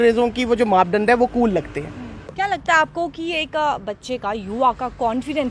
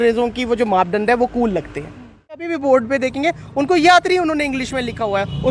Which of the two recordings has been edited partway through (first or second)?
second